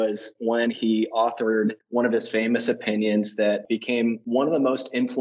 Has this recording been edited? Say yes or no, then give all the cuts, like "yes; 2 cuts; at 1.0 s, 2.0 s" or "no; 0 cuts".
yes; 2 cuts; at 1.8 s, 3.7 s